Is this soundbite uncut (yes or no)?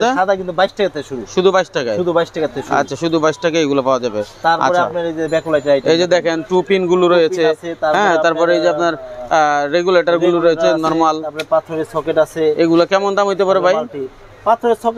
yes